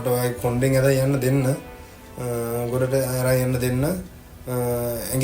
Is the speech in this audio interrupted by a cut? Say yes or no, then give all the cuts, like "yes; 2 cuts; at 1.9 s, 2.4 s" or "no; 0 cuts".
no; 0 cuts